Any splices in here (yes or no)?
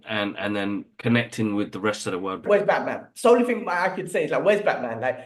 yes